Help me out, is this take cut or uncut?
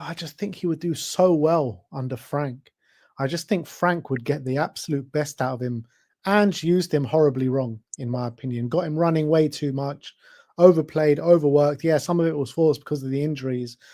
uncut